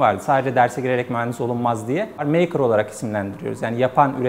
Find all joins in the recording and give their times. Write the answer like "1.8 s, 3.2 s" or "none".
2.2 s